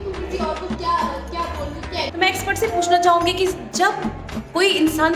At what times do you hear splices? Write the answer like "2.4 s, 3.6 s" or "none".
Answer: 2.0 s